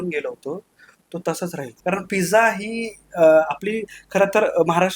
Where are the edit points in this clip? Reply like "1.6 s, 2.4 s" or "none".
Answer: 1.7 s